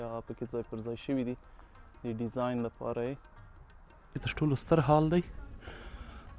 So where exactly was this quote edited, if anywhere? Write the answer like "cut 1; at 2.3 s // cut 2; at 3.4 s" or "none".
cut 1; at 4.2 s